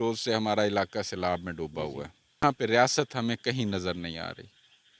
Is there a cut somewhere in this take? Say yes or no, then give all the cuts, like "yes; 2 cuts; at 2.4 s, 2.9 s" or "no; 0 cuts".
yes; 1 cut; at 2.4 s